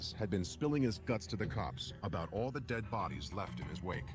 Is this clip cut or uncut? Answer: uncut